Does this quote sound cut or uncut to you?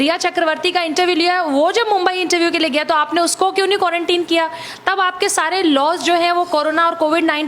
uncut